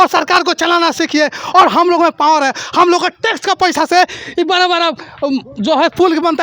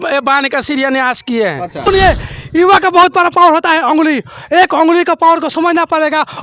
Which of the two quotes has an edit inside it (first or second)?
second